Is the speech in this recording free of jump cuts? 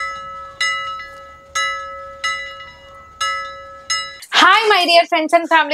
yes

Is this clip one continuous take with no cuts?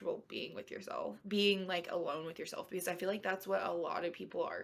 yes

